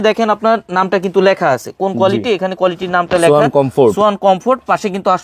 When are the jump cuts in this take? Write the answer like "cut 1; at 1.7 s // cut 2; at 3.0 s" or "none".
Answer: none